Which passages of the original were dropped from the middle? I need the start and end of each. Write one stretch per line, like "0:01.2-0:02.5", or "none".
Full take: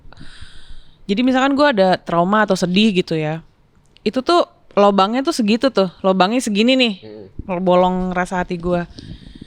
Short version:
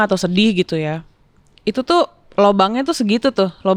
none

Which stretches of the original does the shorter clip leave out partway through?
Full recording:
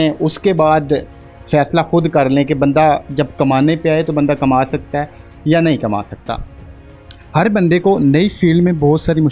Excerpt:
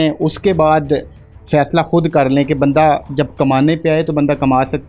none

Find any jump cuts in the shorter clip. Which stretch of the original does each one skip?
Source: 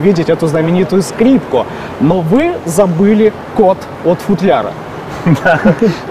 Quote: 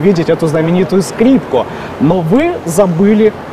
none

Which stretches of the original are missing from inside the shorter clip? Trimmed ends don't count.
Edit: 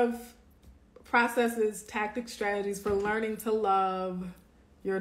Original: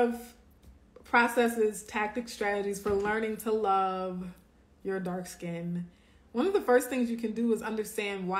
none

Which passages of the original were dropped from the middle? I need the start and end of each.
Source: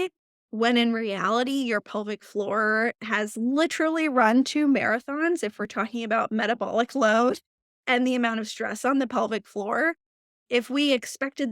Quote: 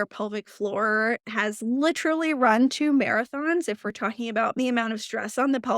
0:06.3-0:08.0

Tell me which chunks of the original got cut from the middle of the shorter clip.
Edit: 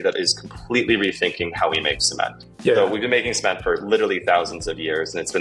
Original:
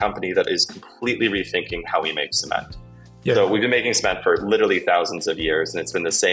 0:02.8-0:03.1

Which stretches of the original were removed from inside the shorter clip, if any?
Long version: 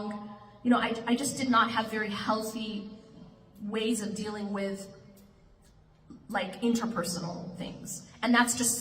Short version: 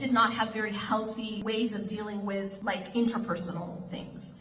0:02.8-0:03.7
0:04.8-0:06.2

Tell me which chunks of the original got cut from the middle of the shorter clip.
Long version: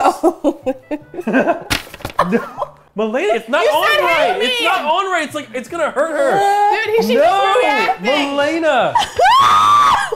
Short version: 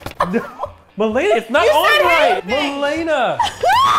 0:04.4-0:08.0

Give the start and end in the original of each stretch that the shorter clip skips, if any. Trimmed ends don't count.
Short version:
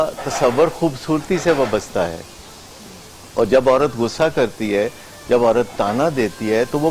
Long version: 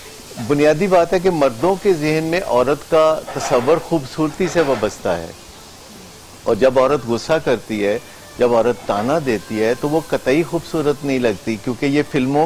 none

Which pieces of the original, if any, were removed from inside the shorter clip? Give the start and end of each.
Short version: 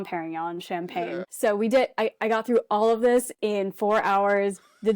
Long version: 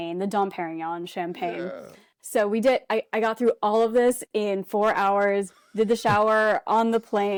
0:01.7-0:02.2

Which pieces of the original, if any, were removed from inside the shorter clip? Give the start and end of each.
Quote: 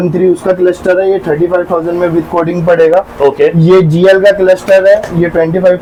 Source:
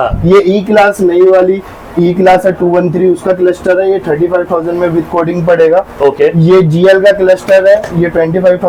none

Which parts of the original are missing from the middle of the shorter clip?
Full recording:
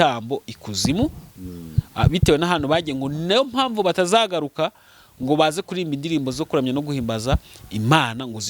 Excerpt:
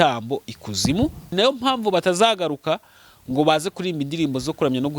0:01.2-0:03.1

